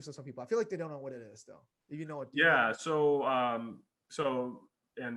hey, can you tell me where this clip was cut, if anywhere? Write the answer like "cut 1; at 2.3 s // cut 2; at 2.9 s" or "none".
none